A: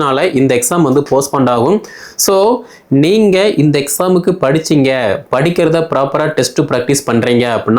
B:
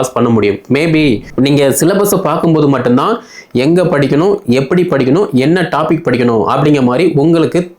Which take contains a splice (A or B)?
B